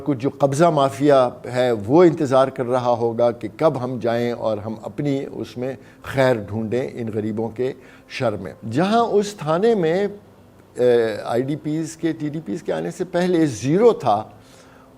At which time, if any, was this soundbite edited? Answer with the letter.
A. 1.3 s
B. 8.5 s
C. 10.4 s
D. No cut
B